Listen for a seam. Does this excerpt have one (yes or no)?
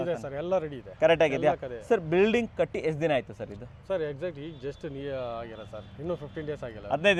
no